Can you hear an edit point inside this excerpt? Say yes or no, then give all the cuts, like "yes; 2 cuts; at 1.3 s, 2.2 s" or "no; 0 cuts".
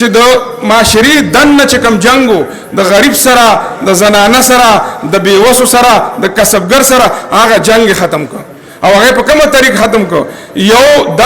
no; 0 cuts